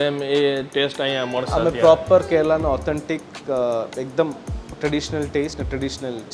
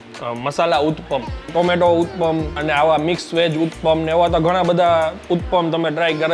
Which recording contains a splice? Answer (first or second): second